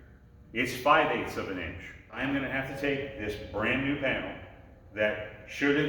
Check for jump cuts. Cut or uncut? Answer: cut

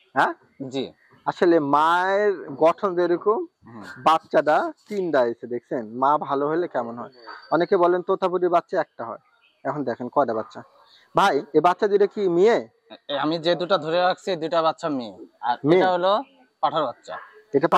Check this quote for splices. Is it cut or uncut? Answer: uncut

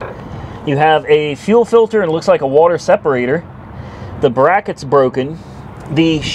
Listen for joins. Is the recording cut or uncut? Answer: uncut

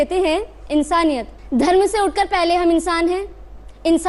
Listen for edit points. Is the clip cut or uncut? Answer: cut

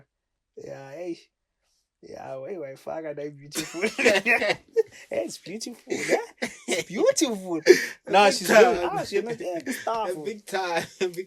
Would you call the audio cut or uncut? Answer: uncut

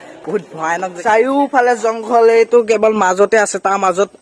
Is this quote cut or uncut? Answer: cut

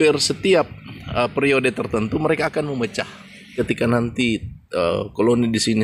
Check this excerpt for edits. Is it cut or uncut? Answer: cut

